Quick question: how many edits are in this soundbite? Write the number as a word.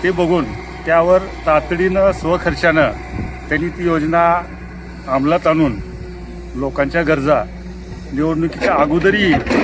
zero